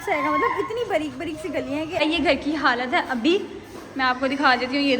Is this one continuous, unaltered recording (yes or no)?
no